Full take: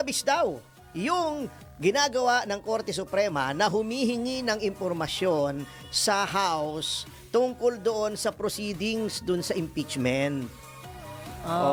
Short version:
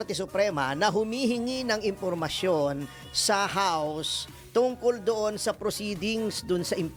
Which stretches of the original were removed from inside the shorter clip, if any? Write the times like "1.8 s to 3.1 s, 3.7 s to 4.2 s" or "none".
none